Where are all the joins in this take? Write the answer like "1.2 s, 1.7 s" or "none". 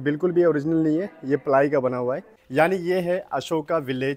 2.3 s